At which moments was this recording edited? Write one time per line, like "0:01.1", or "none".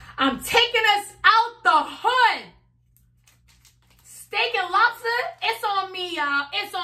none